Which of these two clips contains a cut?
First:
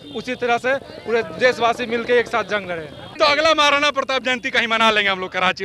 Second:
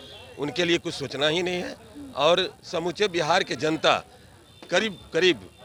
first; 1 cut; at 3.2 s

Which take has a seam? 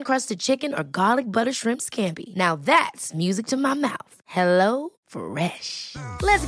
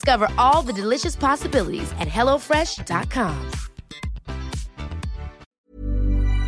second; 1 cut; at 5.4 s

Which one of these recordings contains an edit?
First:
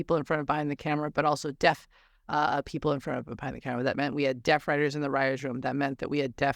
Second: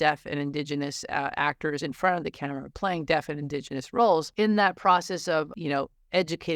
second; 2 cuts; at 4.3 s, 5.5 s

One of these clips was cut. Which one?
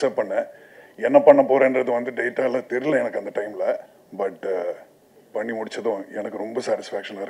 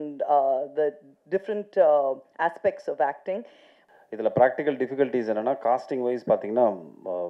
second; 1 cut; at 3.8 s

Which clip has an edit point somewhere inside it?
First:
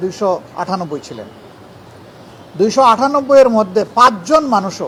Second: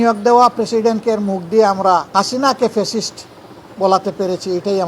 second; 1 cut; at 2.1 s

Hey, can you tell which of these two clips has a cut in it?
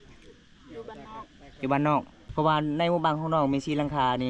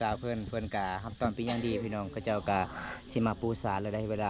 first; 1 cut; at 2.2 s

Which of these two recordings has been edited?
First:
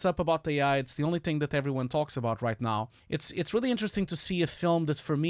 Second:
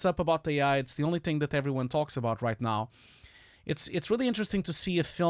first; 1 cut; at 3.0 s

